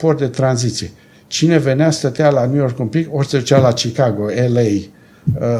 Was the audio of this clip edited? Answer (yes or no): no